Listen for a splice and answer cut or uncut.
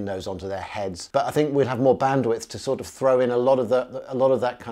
cut